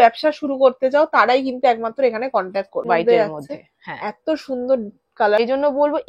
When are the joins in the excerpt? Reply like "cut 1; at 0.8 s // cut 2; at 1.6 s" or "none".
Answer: cut 1; at 2.9 s // cut 2; at 5.4 s